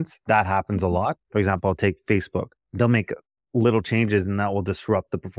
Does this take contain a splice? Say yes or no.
yes